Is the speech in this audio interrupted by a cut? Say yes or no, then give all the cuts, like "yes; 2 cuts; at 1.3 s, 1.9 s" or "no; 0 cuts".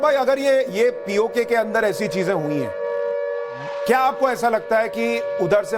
yes; 1 cut; at 3.8 s